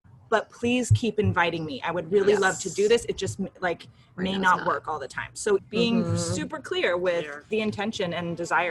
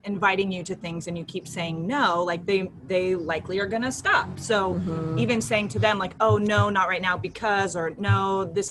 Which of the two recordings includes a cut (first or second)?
first